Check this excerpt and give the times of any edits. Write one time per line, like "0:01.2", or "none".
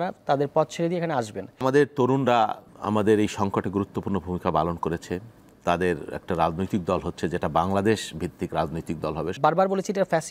0:01.6
0:02.7
0:09.3